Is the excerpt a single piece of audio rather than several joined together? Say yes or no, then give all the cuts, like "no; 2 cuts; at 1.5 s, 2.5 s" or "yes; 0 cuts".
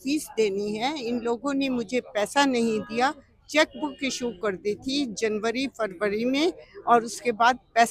yes; 0 cuts